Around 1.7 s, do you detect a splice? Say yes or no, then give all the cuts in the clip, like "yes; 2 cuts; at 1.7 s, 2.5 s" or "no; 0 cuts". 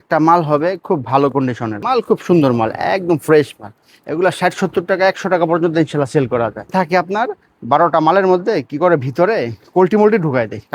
yes; 2 cuts; at 1.7 s, 6.7 s